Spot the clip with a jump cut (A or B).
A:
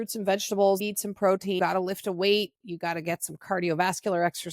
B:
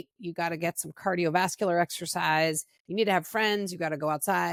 A